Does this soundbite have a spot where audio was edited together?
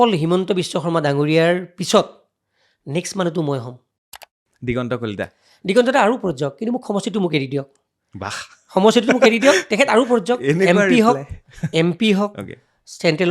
yes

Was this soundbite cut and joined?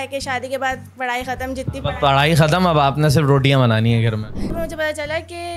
yes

